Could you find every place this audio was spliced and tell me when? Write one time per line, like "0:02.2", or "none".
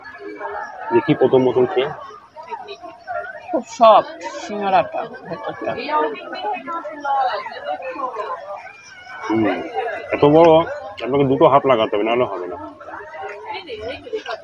none

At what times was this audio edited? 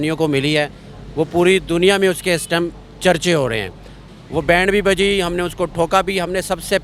0:03.9

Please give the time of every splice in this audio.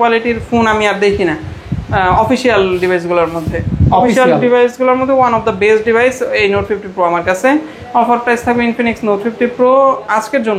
none

